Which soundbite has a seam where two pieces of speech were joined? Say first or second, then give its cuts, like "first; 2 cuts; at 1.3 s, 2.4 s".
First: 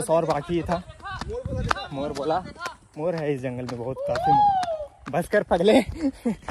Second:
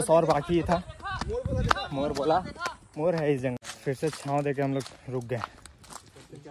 second; 1 cut; at 3.6 s